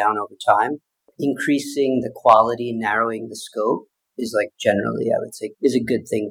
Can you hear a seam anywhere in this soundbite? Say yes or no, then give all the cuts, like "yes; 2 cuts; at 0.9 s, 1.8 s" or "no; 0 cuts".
yes; 1 cut; at 1.1 s